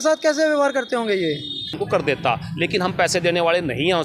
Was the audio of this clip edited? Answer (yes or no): yes